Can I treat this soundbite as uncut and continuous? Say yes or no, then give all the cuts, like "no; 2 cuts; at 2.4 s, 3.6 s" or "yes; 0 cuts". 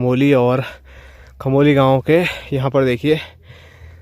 yes; 0 cuts